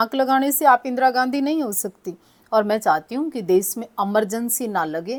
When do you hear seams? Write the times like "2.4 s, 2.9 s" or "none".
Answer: none